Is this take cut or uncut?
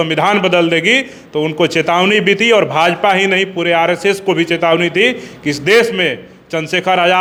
uncut